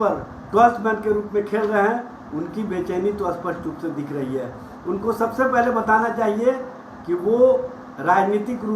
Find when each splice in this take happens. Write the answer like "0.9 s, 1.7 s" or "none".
none